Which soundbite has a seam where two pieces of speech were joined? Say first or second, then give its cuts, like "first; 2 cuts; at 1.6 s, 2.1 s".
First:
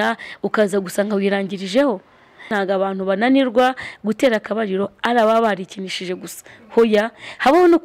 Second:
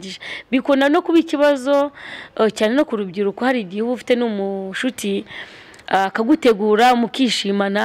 first; 1 cut; at 2.5 s